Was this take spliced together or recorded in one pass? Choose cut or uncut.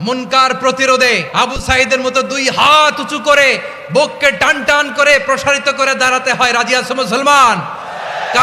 cut